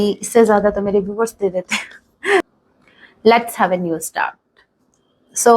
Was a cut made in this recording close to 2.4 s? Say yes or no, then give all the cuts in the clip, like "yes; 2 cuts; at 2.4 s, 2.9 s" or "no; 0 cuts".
yes; 1 cut; at 2.4 s